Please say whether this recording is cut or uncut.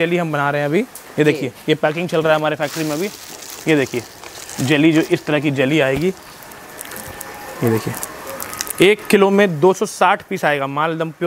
uncut